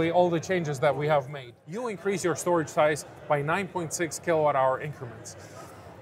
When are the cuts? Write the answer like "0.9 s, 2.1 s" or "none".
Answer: 1.5 s